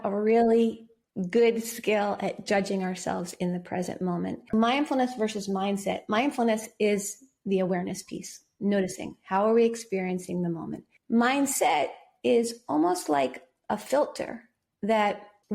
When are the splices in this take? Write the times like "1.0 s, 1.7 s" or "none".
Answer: 4.5 s